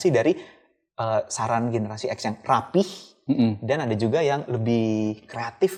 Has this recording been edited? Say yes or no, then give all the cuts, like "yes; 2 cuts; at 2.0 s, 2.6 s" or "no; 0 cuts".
no; 0 cuts